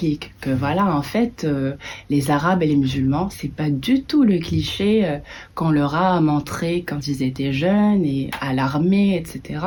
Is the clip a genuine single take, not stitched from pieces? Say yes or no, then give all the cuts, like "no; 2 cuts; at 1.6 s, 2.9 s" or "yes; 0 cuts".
yes; 0 cuts